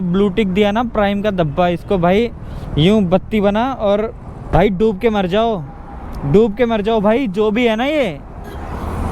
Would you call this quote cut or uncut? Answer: cut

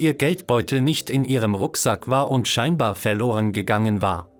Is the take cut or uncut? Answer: uncut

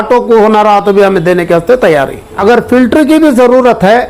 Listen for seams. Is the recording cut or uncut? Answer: cut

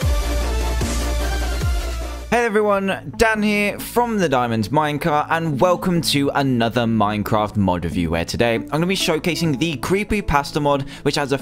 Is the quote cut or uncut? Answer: cut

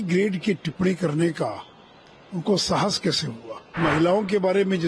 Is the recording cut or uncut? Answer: cut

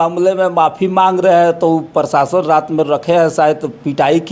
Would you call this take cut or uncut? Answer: uncut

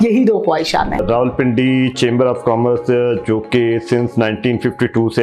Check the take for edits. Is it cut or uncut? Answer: cut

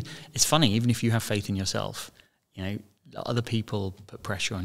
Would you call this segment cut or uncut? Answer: uncut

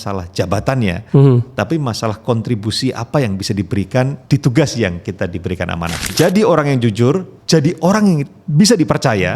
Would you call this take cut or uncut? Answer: cut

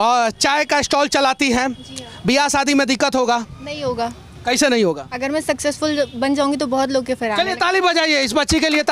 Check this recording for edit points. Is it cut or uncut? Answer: uncut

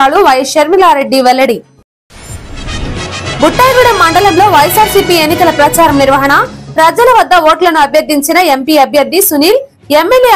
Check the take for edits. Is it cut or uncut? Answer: uncut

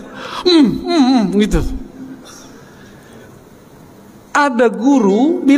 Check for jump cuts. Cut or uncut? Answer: uncut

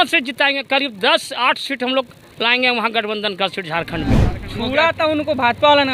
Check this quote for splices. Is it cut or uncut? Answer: cut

